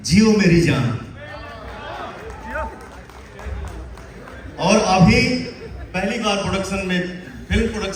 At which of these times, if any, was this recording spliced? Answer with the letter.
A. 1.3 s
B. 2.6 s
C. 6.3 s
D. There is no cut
D